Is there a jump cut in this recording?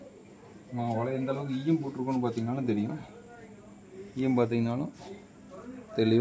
no; 0 cuts

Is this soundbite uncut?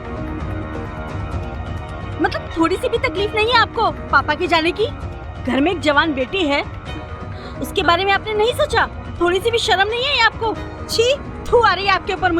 no; 2 cuts; at 9.0 s, 10.7 s

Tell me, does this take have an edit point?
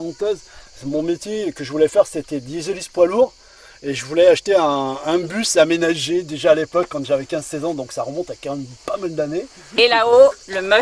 yes; 1 cut; at 9.7 s

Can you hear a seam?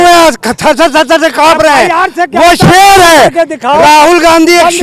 no; 0 cuts

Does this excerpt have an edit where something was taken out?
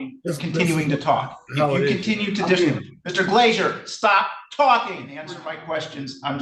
yes; 1 cut; at 5.3 s

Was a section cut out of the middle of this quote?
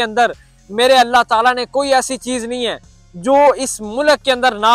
no; 0 cuts

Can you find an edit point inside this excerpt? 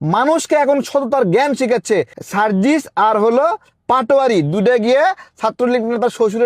yes; 1 cut; at 2.2 s

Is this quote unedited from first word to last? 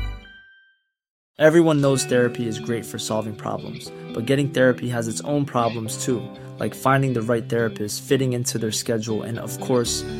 no; 1 cut; at 1.2 s

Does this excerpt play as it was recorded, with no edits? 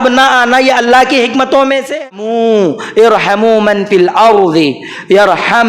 no; 1 cut; at 2.0 s

